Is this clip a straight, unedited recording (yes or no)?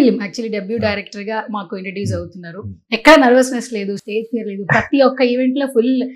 yes